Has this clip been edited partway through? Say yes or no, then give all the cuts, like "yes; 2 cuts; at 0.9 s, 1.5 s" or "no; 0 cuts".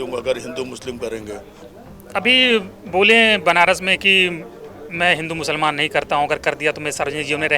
yes; 1 cut; at 1.6 s